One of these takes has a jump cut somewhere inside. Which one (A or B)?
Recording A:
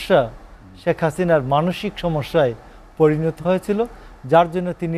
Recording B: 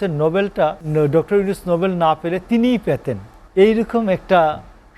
B